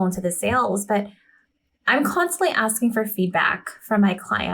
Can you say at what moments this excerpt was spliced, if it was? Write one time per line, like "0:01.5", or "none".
none